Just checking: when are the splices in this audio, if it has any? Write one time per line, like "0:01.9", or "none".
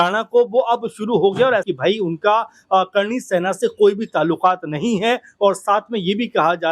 0:01.7